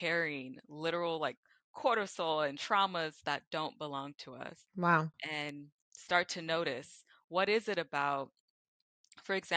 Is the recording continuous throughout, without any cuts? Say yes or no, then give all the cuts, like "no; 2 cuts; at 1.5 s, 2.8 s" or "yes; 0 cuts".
yes; 0 cuts